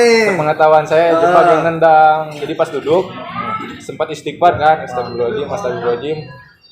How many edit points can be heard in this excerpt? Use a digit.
1